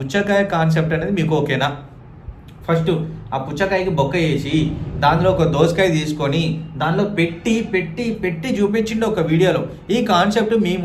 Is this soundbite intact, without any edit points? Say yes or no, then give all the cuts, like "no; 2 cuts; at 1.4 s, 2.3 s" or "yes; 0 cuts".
yes; 0 cuts